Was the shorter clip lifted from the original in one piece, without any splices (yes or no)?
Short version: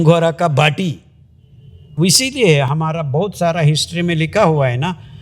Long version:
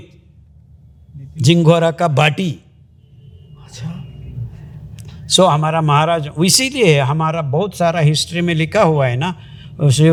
no